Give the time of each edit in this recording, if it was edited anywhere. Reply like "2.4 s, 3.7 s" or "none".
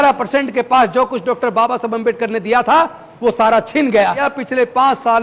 4.3 s